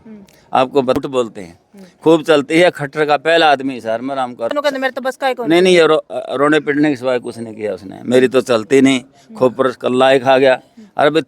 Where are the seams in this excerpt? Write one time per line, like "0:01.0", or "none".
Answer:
0:01.0
0:04.5